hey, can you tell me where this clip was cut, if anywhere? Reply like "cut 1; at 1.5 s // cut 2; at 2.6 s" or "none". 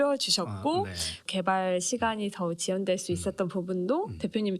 cut 1; at 1.2 s